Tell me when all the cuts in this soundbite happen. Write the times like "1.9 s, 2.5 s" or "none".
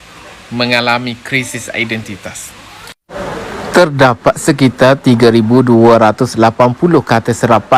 none